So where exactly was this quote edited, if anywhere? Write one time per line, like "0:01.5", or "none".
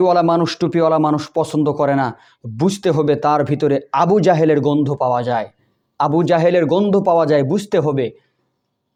none